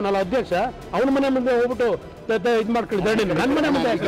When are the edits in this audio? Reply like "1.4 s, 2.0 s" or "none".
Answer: none